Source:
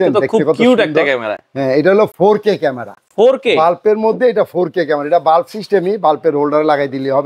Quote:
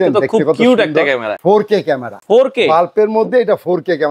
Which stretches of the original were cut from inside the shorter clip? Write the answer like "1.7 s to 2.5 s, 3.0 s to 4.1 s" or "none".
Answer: 1.7 s to 2.6 s